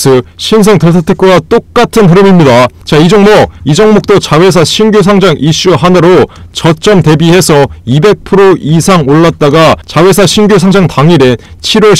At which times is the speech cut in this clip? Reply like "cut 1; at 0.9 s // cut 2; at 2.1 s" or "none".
cut 1; at 2.8 s // cut 2; at 3.6 s